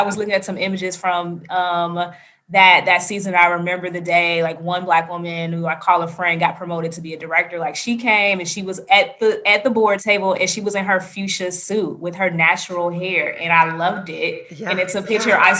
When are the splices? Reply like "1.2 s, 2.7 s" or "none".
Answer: 10.0 s